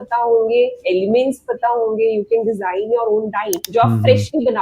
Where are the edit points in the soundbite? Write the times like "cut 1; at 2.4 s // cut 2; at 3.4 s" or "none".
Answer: cut 1; at 3.6 s